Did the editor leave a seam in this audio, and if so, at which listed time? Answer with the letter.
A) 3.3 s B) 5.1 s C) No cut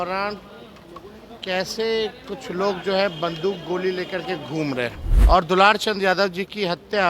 B